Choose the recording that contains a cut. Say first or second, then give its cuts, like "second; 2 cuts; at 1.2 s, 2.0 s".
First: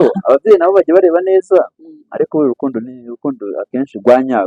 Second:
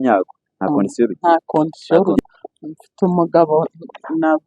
second; 1 cut; at 2.2 s